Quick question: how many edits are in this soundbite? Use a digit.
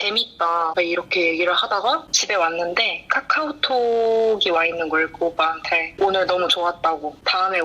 1